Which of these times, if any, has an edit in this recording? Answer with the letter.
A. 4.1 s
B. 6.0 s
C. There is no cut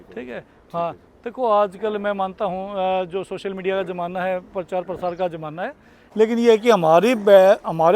B